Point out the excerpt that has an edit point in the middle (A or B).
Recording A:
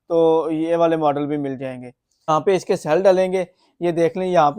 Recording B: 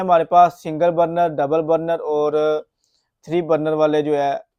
A